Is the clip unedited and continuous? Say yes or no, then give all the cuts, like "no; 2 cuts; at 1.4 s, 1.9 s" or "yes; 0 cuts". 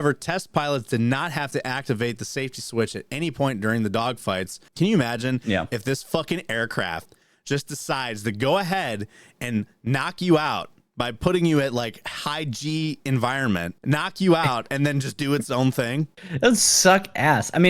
no; 3 cuts; at 4.6 s, 13.7 s, 16.2 s